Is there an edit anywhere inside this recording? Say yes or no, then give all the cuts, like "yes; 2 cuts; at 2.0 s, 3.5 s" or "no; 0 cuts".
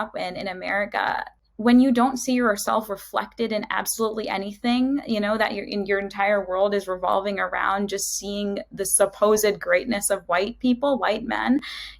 yes; 1 cut; at 1.4 s